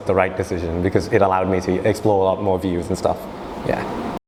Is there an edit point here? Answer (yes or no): no